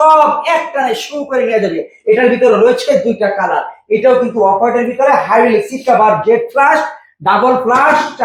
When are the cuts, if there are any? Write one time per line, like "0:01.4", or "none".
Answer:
none